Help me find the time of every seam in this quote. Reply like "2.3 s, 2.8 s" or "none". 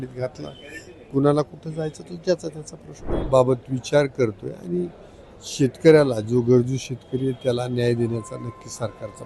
3.1 s